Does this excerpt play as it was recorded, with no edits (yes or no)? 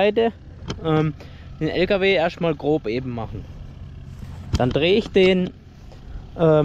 yes